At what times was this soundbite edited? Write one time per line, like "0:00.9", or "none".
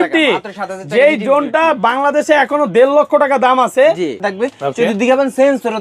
0:04.2